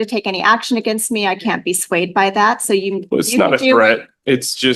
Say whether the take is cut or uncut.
uncut